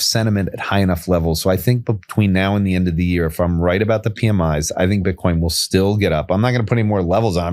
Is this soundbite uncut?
yes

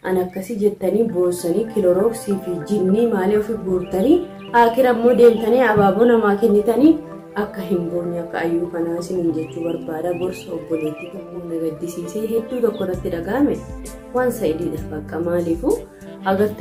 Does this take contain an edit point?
yes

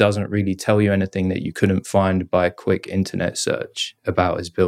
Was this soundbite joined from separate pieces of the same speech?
no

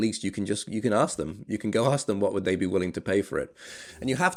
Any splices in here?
no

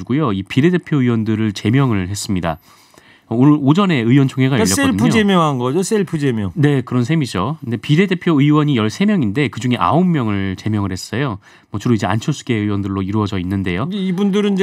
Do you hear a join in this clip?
no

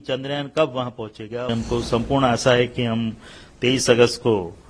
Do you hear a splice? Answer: yes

